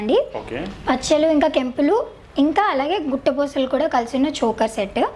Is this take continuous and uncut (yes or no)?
yes